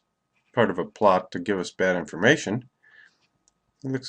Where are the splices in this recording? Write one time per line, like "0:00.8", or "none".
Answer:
0:00.9

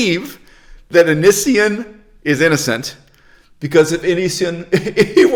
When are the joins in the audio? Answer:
none

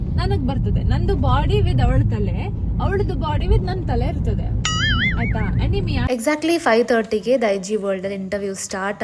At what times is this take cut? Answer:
0:06.1

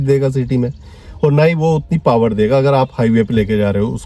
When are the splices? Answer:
none

